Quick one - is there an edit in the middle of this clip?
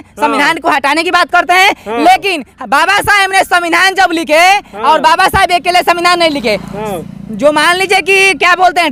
no; 0 cuts

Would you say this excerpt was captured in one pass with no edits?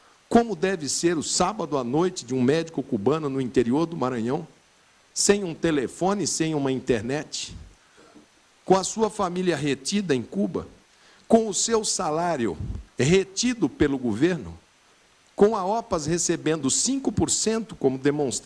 yes; 0 cuts

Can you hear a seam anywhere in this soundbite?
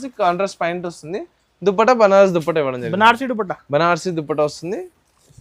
no; 0 cuts

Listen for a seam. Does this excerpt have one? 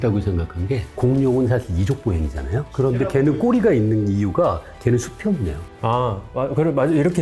no; 0 cuts

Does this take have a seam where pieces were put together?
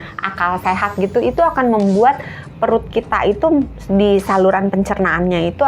no; 0 cuts

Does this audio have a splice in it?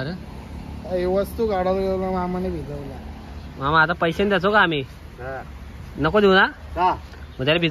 no; 0 cuts

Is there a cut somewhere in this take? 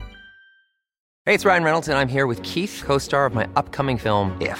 yes; 1 cut; at 1.1 s

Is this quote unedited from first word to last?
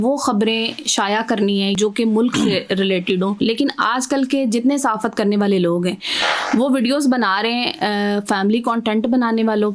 no; 2 cuts; at 1.8 s, 3.4 s

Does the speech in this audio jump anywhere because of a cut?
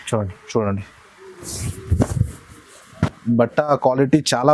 no; 0 cuts

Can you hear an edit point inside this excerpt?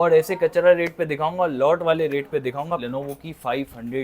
yes; 1 cut; at 2.8 s

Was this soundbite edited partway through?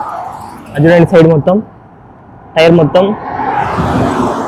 no; 0 cuts

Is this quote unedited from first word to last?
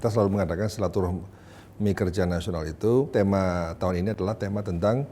no; 1 cut; at 3.1 s

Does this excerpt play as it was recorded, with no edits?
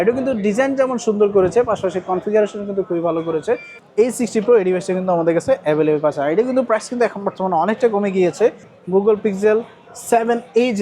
no; 2 cuts; at 3.7 s, 8.8 s

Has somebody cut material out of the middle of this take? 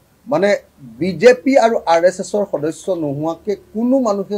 no; 0 cuts

